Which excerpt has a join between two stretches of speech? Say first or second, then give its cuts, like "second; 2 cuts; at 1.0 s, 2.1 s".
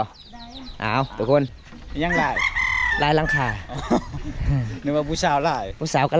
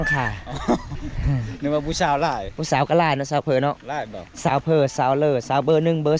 first; 1 cut; at 1.6 s